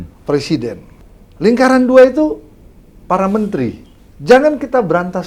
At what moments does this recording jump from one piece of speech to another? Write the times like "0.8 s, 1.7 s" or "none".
0.9 s, 3.9 s